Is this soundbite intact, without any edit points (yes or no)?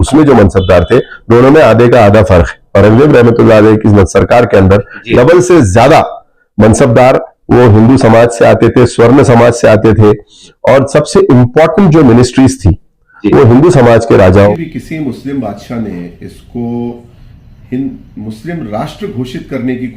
no